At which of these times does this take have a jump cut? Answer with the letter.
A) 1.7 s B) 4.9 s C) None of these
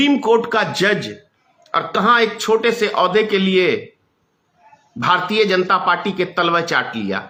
C